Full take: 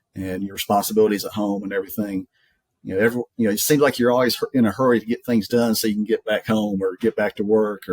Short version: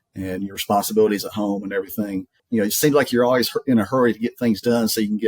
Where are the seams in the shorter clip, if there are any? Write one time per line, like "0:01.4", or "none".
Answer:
0:02.4